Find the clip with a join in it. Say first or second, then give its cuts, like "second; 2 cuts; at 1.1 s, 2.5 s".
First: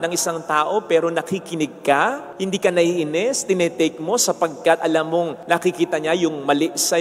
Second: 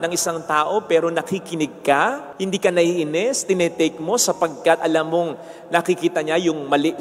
first; 1 cut; at 5.4 s